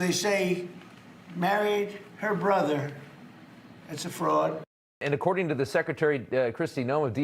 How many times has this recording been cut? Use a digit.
1